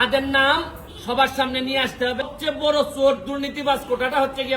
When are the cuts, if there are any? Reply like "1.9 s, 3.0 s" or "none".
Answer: 2.3 s